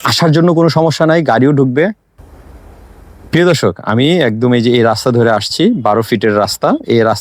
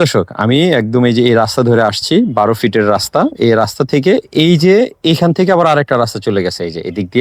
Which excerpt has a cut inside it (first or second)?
first